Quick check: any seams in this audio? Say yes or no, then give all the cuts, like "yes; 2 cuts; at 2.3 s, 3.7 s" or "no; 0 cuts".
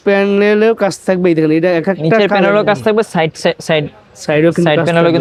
no; 0 cuts